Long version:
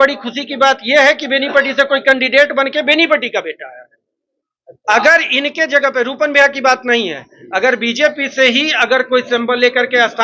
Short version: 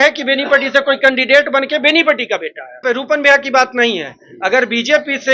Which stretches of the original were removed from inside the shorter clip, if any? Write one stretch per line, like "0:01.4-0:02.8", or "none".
0:03.9-0:05.9